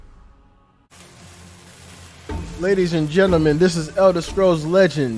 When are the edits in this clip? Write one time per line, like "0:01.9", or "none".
0:00.9

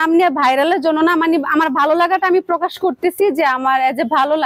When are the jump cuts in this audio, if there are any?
none

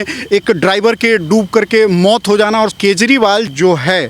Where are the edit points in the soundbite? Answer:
0:02.8

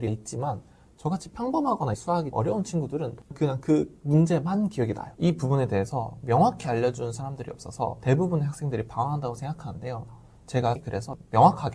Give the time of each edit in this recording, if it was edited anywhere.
0:03.2

